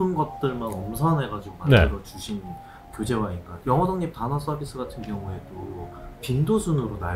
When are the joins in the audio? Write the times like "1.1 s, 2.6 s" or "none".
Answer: 3.5 s

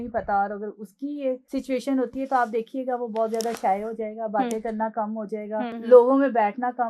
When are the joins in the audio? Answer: 1.4 s, 5.8 s

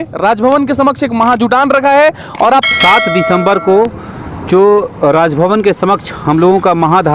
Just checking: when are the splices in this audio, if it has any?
2.7 s

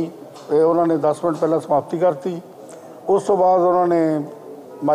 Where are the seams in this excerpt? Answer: none

